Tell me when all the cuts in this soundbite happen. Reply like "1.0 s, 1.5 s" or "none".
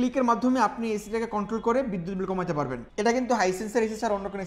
2.8 s

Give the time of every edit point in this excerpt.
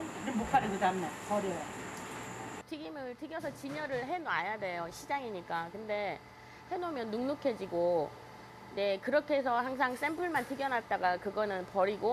2.6 s

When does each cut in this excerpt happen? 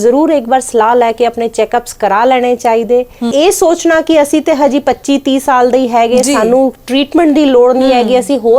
3.3 s

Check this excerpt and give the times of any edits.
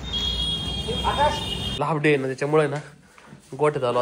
1.8 s

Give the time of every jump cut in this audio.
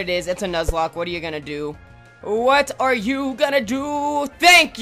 none

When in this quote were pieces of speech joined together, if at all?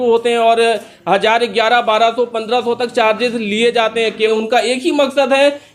4.3 s

